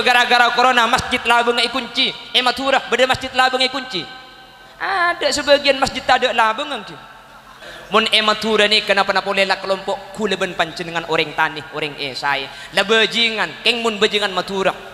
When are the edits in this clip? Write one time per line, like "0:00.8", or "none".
0:07.7